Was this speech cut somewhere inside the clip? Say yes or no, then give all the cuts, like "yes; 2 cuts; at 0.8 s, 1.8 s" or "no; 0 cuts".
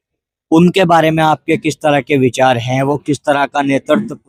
no; 0 cuts